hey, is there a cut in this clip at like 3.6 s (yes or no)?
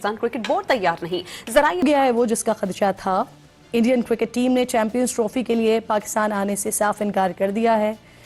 no